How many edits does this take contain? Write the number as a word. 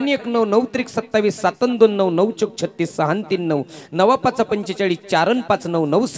zero